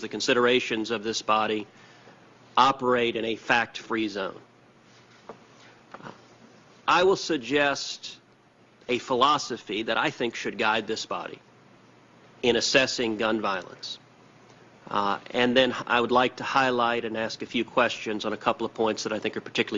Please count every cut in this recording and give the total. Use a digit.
1